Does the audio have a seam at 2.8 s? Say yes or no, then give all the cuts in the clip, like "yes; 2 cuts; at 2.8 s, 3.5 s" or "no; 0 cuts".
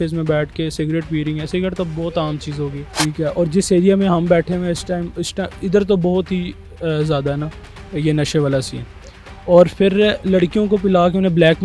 yes; 1 cut; at 2.8 s